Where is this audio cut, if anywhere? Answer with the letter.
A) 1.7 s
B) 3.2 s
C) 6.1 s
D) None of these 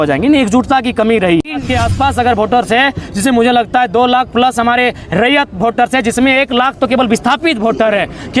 A